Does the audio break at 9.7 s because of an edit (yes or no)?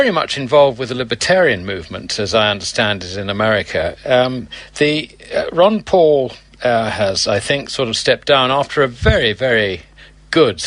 no